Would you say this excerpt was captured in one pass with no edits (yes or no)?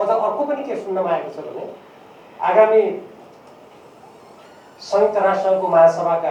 yes